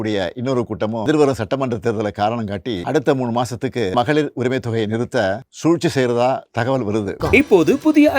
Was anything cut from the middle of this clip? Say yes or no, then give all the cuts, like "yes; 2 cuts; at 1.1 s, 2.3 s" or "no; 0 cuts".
yes; 5 cuts; at 1.1 s, 2.8 s, 3.9 s, 5.5 s, 7.2 s